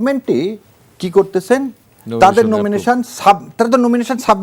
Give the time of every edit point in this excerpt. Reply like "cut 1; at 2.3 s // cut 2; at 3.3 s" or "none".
none